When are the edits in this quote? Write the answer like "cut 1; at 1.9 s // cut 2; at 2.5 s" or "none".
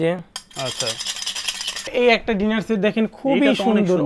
cut 1; at 1.9 s